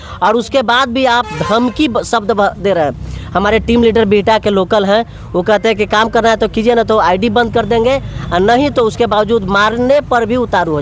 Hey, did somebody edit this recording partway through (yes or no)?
no